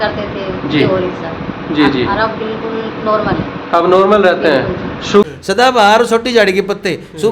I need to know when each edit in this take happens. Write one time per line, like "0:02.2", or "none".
0:05.3